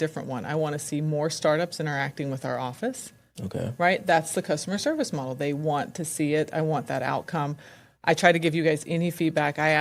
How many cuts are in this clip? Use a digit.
0